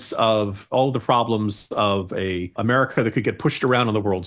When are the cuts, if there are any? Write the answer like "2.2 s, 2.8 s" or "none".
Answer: 2.6 s